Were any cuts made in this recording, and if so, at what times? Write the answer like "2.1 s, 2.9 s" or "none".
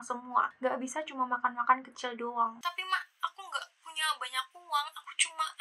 none